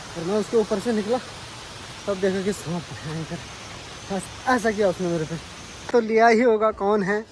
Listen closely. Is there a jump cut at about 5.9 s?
yes; 1 cut; at 5.9 s

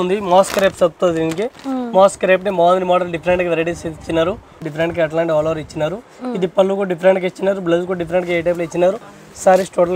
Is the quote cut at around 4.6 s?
yes; 1 cut; at 4.6 s

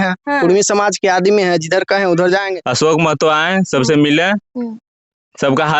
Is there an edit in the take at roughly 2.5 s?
yes; 1 cut; at 2.5 s

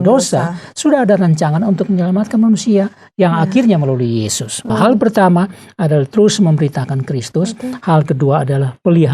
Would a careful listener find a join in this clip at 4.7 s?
yes; 1 cut; at 4.7 s

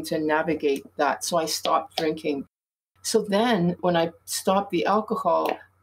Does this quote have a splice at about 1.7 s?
no; 1 cut; at 3.8 s

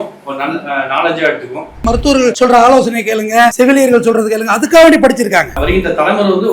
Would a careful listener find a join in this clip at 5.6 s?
yes; 2 cuts; at 1.8 s, 5.6 s

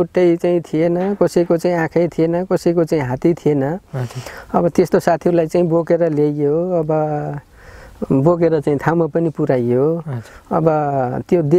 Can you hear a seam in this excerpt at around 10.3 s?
no; 0 cuts

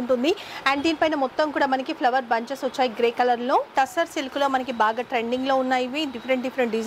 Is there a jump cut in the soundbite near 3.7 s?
yes; 1 cut; at 3.7 s

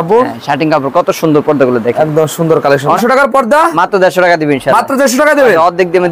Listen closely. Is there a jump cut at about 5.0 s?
no; 1 cut; at 3.0 s

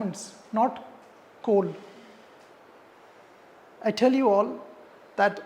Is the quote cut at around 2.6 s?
yes; 1 cut; at 2.6 s

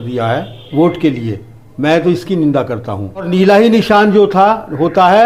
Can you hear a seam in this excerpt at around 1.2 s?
no; 1 cut; at 3.3 s

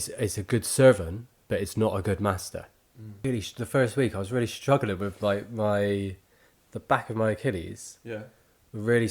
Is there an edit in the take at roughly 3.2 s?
yes; 1 cut; at 3.2 s

